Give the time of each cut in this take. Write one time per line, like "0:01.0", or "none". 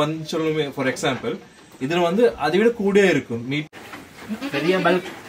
0:03.7